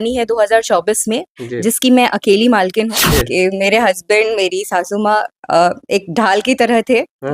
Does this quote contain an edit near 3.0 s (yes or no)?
yes